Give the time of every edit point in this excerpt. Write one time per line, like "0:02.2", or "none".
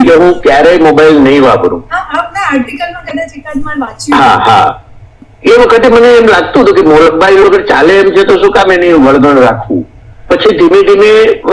none